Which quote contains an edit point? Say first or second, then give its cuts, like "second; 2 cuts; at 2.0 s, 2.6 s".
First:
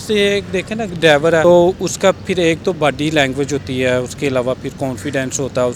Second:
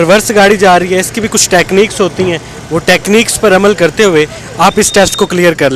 first; 1 cut; at 1.4 s